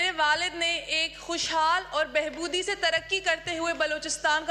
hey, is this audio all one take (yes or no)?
yes